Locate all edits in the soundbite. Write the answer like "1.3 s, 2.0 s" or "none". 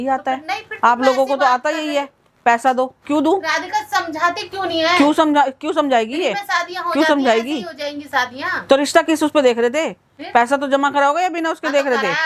none